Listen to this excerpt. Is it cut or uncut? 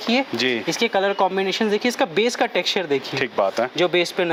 uncut